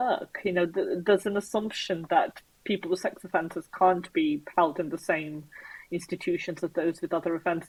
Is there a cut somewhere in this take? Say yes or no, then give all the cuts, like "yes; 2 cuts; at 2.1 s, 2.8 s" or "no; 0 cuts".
no; 0 cuts